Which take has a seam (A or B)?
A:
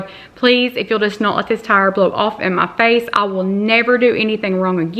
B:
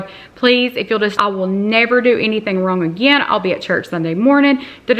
B